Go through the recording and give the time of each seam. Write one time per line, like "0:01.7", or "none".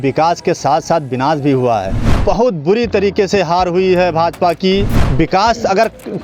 0:02.1
0:05.0